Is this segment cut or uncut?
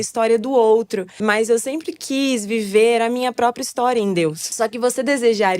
cut